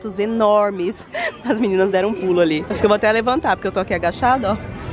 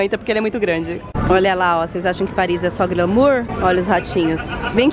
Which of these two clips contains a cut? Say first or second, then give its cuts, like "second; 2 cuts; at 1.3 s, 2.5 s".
second; 1 cut; at 1.0 s